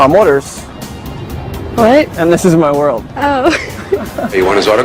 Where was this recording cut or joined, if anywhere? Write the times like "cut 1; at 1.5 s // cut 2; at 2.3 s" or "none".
none